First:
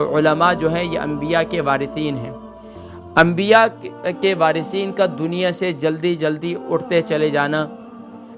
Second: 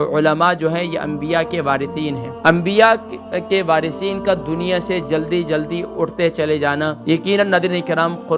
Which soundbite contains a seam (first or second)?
second